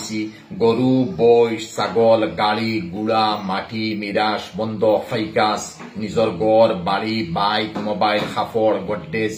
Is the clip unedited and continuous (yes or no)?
yes